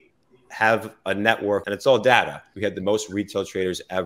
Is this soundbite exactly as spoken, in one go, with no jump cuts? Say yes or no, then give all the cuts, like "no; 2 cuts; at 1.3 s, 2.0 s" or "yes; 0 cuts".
no; 2 cuts; at 1.6 s, 2.4 s